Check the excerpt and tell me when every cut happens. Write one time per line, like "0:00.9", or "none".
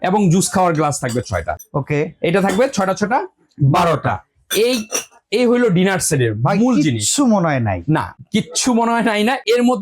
none